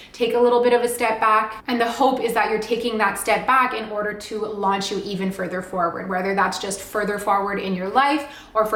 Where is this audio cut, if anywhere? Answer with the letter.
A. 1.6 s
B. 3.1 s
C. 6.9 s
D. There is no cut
D